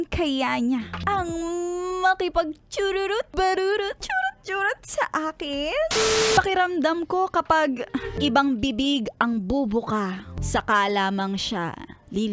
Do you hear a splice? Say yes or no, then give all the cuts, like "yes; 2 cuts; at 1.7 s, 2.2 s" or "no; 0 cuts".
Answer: yes; 6 cuts; at 0.9 s, 3.3 s, 4.0 s, 6.3 s, 8.1 s, 10.3 s